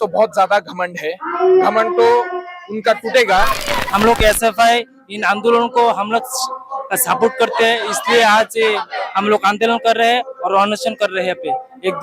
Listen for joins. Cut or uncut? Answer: cut